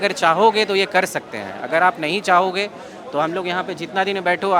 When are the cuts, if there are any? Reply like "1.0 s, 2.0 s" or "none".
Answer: none